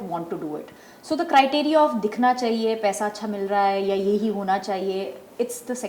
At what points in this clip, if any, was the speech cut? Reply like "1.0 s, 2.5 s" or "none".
none